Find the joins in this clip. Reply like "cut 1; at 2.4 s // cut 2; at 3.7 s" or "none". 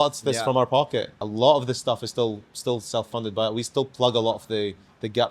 cut 1; at 1.2 s

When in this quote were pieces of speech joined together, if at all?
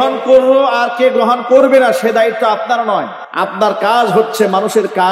cut 1; at 3.2 s

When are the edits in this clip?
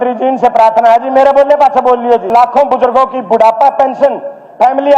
cut 1; at 2.3 s

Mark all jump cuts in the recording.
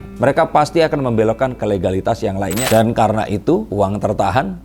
cut 1; at 2.6 s // cut 2; at 3.7 s

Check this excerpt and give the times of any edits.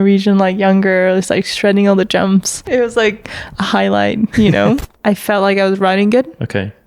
cut 1; at 2.6 s // cut 2; at 4.9 s

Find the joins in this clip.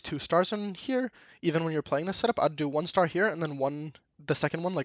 none

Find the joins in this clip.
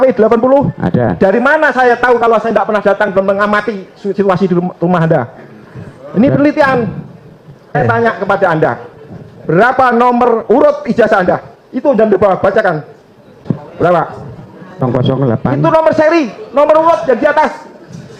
cut 1; at 7.8 s // cut 2; at 13.4 s // cut 3; at 14.8 s

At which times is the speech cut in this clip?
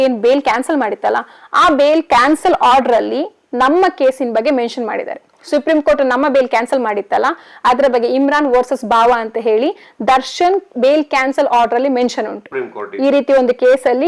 none

